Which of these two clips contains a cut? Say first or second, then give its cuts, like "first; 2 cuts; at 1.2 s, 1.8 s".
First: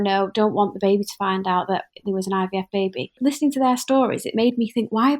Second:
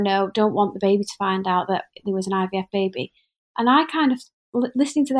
first; 1 cut; at 3.2 s